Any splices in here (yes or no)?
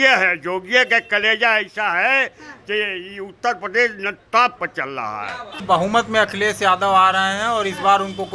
yes